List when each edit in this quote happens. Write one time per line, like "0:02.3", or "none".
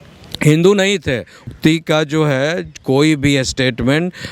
0:01.5

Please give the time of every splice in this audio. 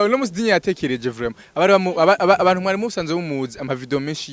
none

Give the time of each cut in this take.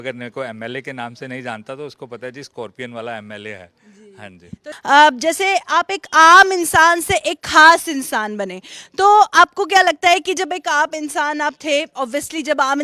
0:04.7

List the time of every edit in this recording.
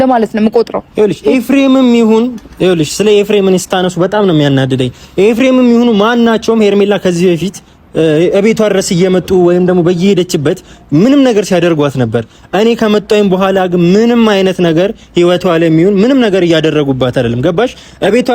none

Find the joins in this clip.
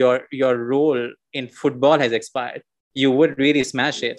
none

